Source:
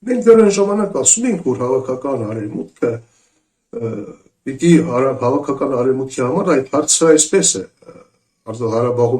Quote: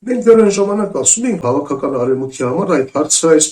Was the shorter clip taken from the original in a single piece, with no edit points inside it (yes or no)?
no